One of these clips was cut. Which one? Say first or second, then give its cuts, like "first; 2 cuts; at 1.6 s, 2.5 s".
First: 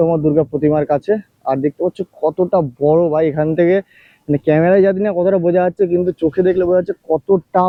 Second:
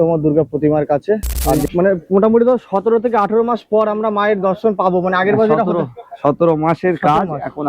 second; 1 cut; at 1.6 s